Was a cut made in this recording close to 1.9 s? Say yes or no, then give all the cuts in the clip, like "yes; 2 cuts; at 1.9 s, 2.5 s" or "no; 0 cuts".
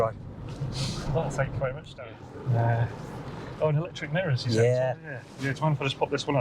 yes; 1 cut; at 1.9 s